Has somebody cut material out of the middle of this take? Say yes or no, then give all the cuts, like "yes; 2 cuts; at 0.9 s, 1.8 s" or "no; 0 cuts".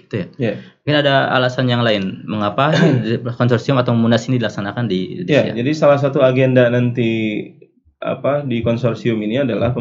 no; 0 cuts